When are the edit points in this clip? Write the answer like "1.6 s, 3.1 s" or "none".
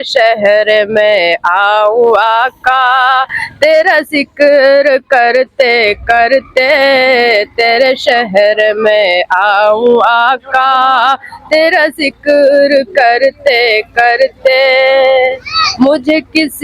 none